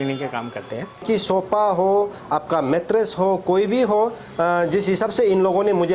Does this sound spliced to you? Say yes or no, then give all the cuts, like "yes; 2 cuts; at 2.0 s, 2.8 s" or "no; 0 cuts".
yes; 1 cut; at 1.0 s